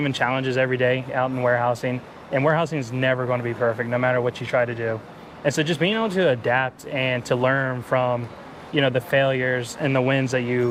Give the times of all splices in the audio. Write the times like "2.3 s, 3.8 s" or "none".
none